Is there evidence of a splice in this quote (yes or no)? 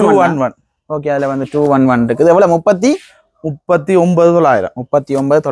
no